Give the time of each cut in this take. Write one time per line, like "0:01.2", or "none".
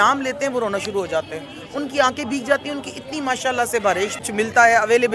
0:04.2